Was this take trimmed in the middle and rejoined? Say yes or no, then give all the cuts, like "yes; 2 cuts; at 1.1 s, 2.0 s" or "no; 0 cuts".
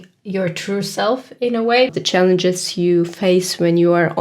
yes; 1 cut; at 1.9 s